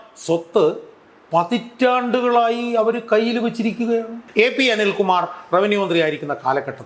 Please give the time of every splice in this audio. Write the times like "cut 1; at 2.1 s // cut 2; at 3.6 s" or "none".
cut 1; at 4.2 s

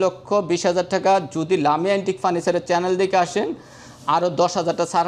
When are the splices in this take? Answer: none

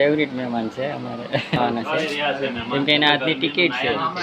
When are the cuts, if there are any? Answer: cut 1; at 1.6 s

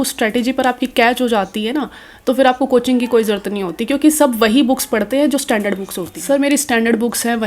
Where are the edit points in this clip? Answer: cut 1; at 6.1 s

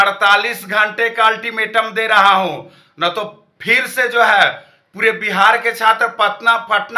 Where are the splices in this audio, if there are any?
none

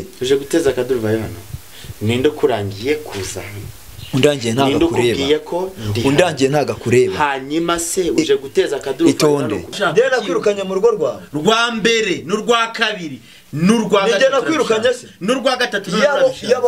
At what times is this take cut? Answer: cut 1; at 9.7 s

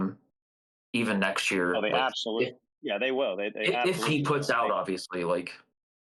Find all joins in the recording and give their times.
none

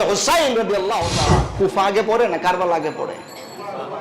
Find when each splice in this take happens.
cut 1; at 1.5 s

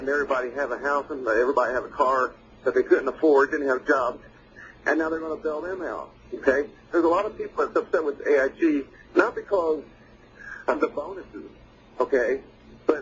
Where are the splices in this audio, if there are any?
cut 1; at 6.8 s

